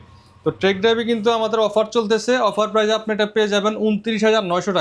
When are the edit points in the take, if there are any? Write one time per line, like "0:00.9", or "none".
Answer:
none